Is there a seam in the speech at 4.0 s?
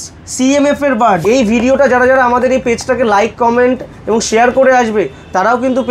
no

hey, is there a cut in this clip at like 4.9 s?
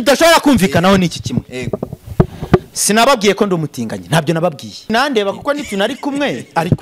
yes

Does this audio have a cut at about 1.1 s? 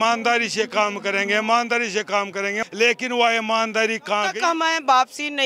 no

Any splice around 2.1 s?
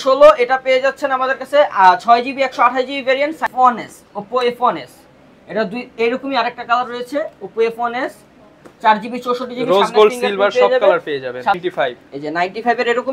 no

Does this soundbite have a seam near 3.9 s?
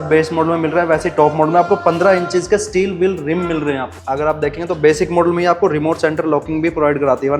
yes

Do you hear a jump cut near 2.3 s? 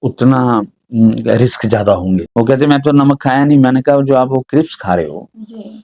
yes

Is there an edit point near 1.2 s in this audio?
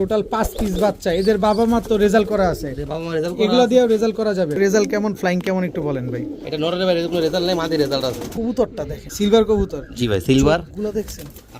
no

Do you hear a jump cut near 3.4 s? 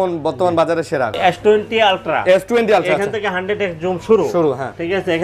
no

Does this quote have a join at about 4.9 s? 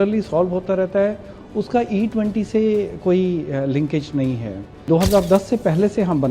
yes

